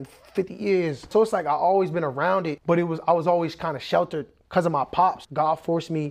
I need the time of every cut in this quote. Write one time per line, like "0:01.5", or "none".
0:01.1
0:02.5
0:05.2